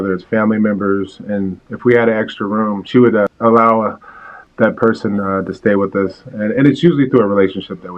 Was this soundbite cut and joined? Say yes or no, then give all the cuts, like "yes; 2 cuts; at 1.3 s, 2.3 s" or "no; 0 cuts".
yes; 1 cut; at 4.4 s